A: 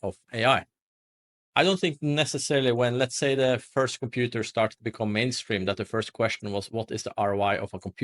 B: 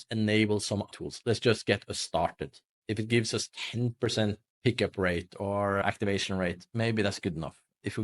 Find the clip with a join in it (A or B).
B